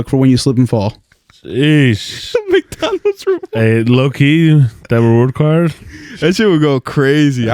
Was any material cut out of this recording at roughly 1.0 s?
no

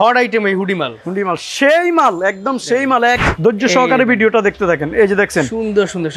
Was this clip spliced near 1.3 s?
no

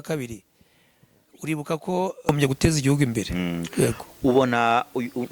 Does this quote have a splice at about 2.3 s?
yes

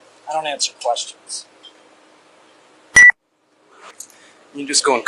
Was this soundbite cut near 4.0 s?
yes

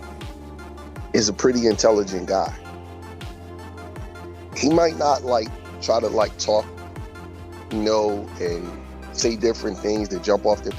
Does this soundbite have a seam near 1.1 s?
yes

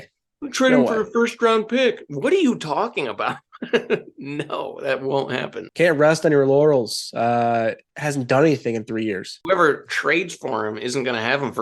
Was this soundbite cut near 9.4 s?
yes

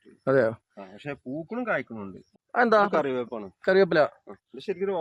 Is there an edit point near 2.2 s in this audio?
yes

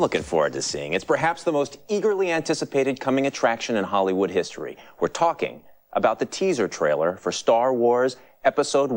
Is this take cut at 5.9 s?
no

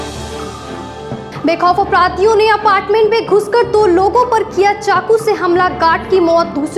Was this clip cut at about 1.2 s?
yes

